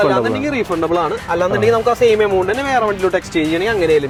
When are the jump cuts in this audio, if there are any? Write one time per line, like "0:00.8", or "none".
none